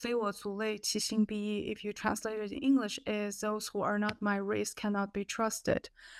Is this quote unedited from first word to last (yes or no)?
yes